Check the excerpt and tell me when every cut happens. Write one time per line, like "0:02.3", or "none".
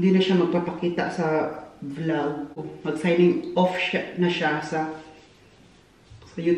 0:02.6